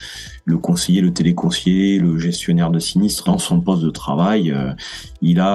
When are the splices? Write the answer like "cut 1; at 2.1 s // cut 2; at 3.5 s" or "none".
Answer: cut 1; at 3.2 s